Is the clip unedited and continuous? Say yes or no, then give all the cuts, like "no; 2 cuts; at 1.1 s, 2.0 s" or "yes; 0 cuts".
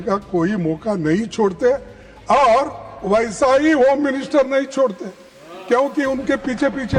yes; 0 cuts